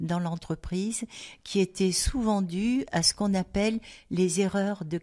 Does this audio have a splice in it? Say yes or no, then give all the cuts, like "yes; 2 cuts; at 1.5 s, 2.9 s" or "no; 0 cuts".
no; 0 cuts